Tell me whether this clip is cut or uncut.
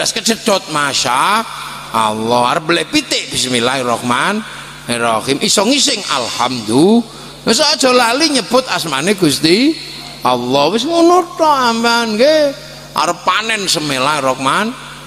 cut